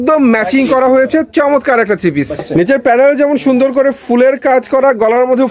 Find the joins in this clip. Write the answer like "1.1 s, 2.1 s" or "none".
2.4 s